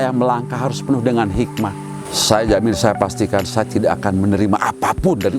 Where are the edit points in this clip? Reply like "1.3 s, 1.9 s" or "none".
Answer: 2.2 s